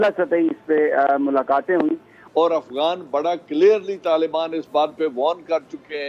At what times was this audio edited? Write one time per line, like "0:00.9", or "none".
0:02.2